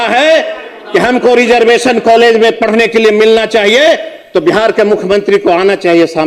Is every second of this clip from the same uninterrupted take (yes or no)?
yes